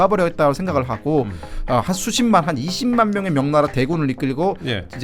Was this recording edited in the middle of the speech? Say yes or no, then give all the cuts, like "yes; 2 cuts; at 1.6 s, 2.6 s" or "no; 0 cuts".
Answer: no; 0 cuts